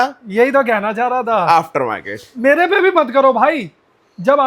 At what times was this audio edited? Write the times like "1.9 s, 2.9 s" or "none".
none

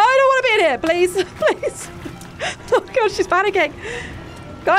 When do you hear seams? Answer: none

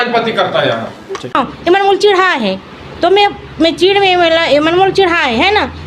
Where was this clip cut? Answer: 1.3 s

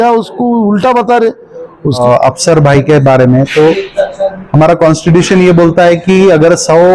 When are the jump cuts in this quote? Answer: 2.0 s

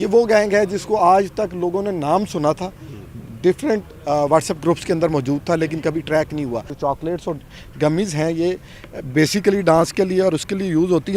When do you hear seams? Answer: 6.7 s

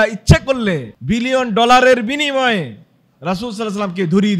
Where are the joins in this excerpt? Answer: 0.9 s

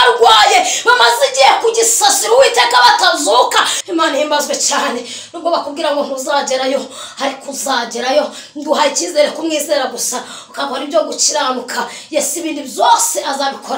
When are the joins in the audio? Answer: 3.8 s

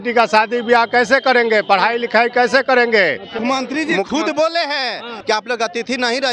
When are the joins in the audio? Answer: 3.4 s, 5.1 s

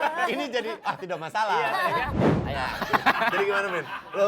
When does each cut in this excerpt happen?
2.1 s

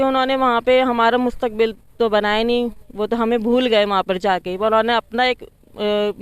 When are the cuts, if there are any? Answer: none

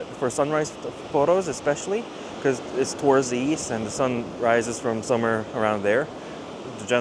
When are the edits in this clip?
none

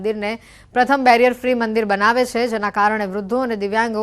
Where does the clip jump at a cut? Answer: 1.5 s

